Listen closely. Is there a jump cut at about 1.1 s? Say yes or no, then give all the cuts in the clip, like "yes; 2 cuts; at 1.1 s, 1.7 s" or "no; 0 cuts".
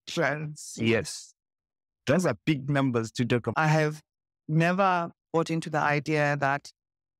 no; 1 cut; at 3.5 s